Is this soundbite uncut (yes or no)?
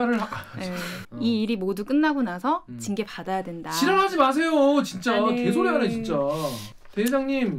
no